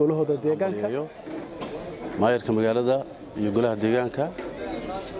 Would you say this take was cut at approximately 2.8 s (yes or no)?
no